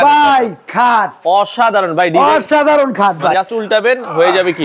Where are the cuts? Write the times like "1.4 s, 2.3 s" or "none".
3.3 s